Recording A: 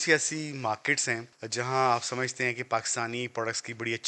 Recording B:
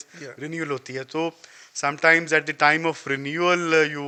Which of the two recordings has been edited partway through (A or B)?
A